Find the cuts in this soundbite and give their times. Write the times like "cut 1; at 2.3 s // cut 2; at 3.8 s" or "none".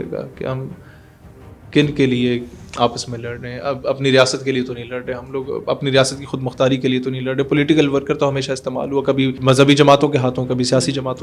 cut 1; at 2.6 s // cut 2; at 9.4 s